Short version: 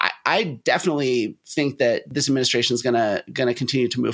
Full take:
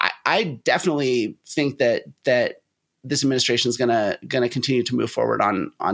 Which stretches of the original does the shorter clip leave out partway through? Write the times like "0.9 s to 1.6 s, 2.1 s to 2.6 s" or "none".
2.1 s to 3.0 s

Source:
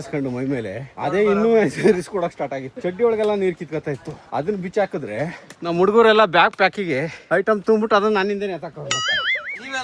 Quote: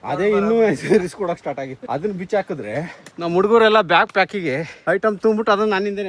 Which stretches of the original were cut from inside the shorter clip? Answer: 2.7 s to 4.2 s

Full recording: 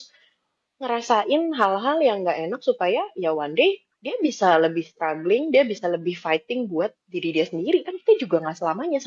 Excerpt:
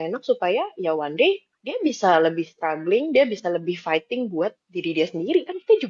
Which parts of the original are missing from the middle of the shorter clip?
none

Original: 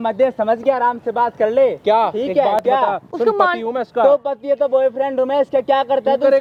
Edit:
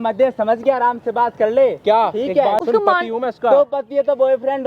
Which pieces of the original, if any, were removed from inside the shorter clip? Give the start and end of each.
2.6 s to 3.1 s

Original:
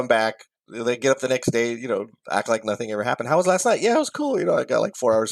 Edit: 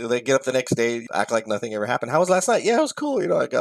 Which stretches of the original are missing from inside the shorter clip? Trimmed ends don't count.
1.8 s to 2.2 s

